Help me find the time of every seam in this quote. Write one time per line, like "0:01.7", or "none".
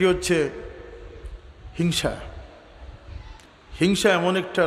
0:03.4